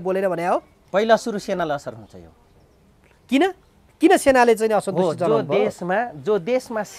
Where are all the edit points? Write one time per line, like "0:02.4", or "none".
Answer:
none

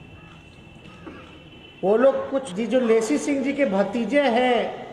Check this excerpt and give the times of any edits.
0:02.4

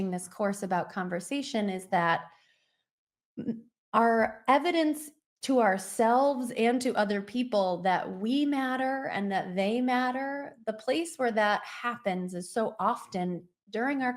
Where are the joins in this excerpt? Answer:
none

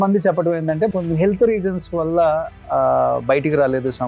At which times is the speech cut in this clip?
0:00.9

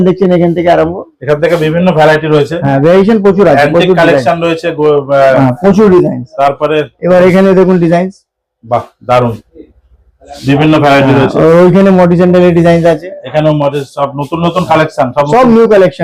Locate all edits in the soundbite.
none

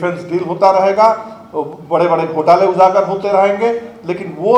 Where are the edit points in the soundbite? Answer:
none

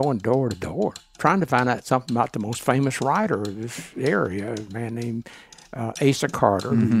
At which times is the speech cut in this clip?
0:01.0

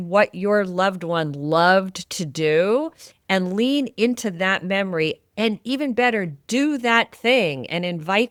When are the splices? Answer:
none

